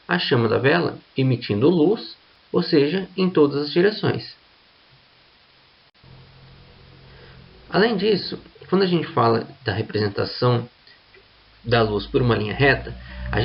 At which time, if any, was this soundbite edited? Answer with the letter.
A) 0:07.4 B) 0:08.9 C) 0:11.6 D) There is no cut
D